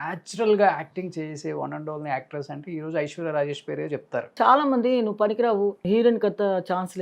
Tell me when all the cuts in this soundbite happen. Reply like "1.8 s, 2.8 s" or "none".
4.3 s, 5.8 s